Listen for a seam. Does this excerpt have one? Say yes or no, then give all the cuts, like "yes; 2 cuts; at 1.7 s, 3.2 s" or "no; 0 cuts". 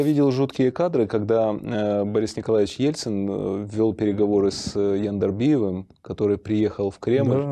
no; 0 cuts